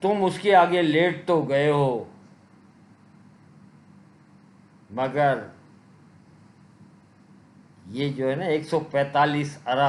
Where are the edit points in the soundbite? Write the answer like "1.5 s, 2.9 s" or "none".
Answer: none